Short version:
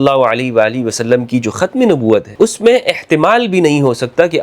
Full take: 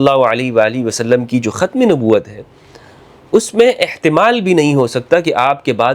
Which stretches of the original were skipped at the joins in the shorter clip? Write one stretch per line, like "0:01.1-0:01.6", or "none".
0:02.3-0:03.2